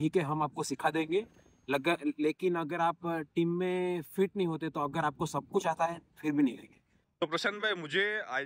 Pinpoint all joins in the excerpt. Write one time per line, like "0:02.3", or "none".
0:07.0